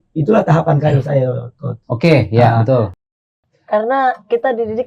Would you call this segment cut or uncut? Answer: cut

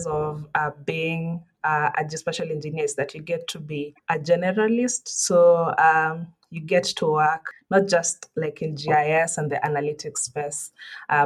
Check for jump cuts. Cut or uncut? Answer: cut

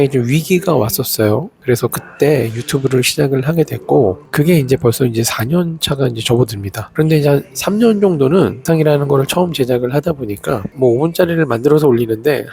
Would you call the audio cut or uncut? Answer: cut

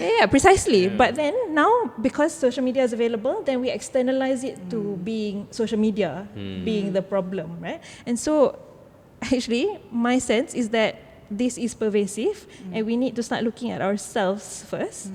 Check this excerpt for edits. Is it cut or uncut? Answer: uncut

